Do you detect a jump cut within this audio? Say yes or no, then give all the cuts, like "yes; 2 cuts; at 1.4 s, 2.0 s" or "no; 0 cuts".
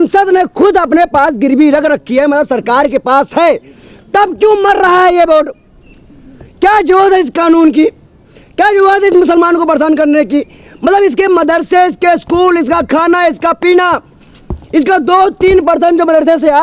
no; 0 cuts